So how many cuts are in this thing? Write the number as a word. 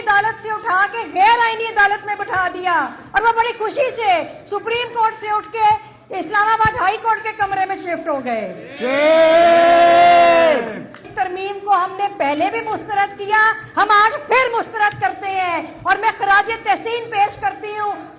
one